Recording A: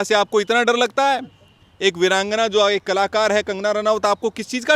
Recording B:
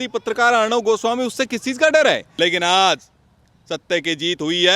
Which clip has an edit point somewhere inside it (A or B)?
B